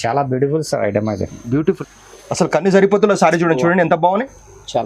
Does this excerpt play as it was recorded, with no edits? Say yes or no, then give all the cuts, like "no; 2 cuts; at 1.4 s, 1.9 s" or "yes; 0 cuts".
no; 1 cut; at 1.7 s